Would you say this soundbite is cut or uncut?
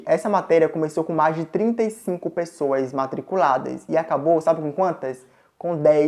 uncut